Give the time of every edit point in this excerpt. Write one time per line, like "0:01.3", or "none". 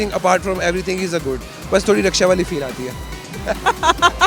none